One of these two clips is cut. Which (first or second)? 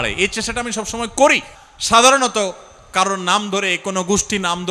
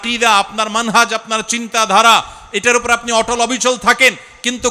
first